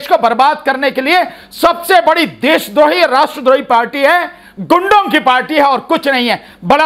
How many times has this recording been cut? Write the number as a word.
zero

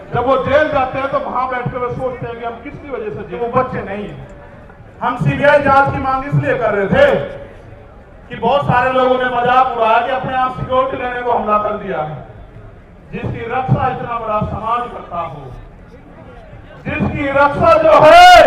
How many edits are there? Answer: one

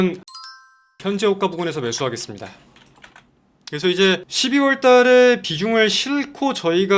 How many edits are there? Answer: one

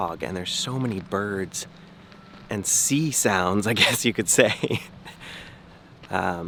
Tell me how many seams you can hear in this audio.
zero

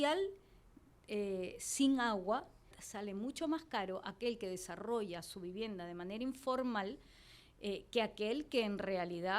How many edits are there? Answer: one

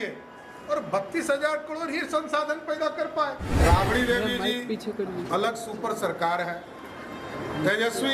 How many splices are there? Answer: one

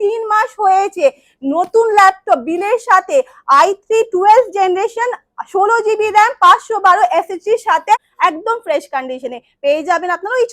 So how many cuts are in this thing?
one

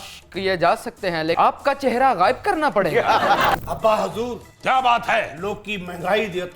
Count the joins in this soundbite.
two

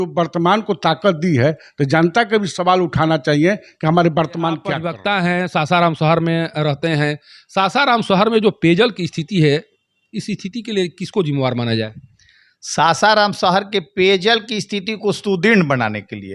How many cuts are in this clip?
one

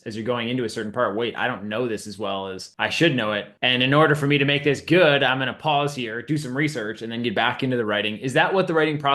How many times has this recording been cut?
two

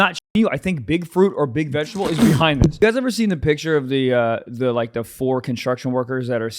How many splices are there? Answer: one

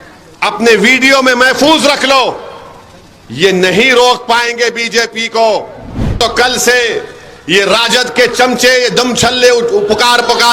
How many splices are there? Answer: one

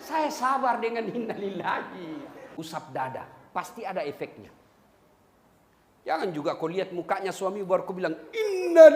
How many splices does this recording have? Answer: one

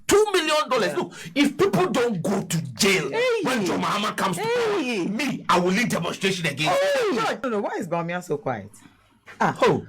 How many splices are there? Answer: one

